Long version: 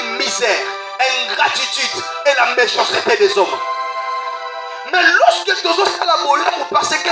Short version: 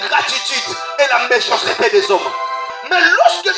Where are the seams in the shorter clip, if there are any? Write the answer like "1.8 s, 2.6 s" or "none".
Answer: 2.7 s